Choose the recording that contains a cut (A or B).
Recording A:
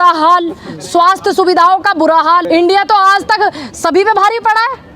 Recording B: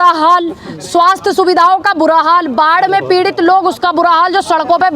A